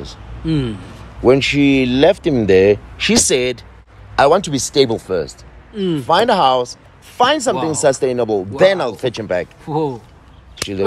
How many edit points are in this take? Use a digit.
0